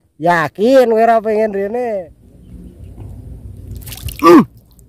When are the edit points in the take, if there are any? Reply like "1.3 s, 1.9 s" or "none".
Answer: 2.2 s